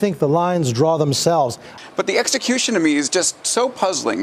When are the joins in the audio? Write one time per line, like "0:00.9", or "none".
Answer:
0:01.7